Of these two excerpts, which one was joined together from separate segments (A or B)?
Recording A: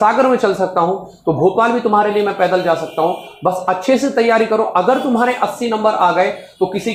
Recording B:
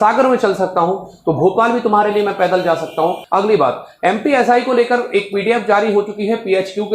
B